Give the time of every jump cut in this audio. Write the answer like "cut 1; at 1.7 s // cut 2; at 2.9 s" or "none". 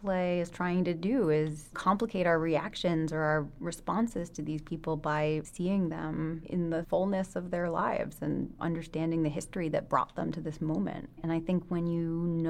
cut 1; at 1.7 s // cut 2; at 5.5 s // cut 3; at 6.8 s // cut 4; at 8.6 s // cut 5; at 11.2 s